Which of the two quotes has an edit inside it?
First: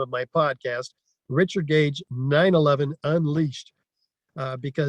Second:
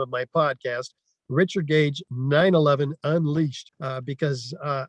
second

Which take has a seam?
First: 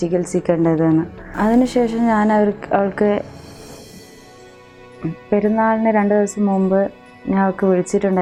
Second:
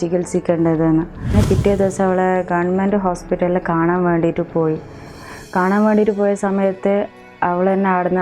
second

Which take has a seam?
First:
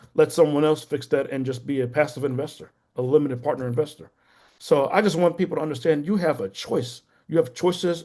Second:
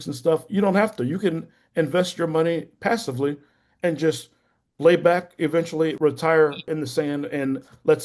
second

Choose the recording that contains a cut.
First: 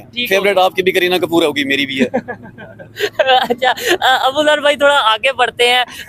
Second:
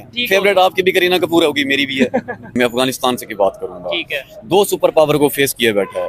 second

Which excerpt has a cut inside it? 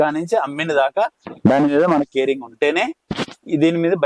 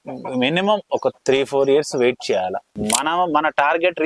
second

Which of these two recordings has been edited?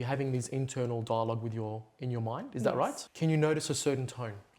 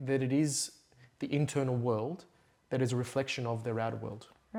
first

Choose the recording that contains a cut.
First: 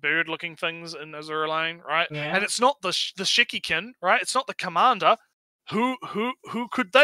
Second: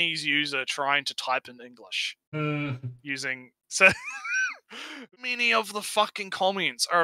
second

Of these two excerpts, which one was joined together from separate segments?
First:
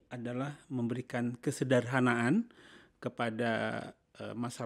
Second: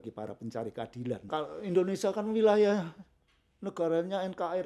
second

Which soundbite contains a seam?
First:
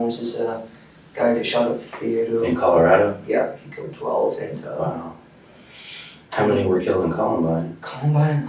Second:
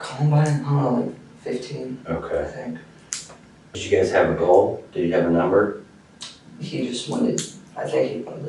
second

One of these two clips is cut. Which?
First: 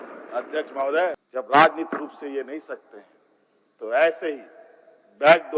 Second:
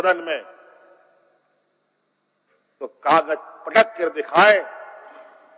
first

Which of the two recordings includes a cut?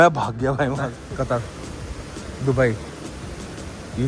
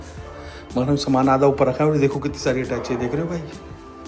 first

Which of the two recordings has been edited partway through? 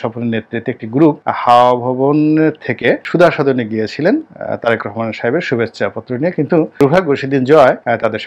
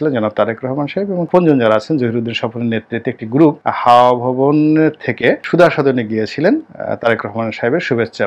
second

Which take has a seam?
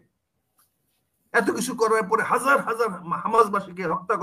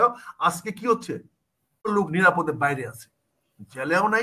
second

